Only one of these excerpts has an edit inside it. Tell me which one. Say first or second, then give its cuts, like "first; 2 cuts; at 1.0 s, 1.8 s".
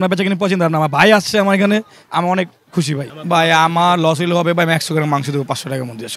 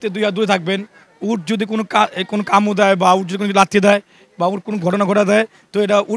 first; 1 cut; at 3.1 s